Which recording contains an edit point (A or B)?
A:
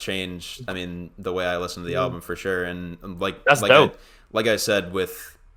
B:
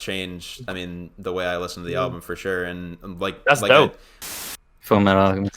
B